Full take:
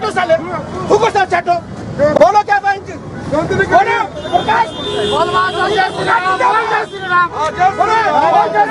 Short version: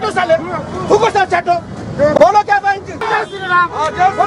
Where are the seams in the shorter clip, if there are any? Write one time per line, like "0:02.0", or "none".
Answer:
0:03.0